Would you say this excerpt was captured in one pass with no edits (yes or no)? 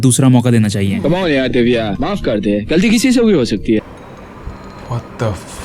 no